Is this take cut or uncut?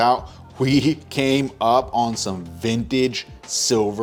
uncut